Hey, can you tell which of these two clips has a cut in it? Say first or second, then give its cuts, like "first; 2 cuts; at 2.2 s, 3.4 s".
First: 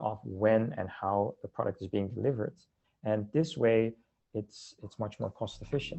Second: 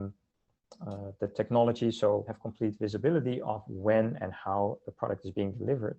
second; 1 cut; at 2.4 s